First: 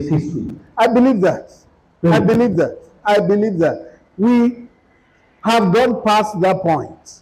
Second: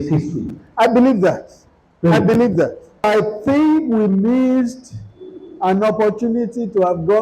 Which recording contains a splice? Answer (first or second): second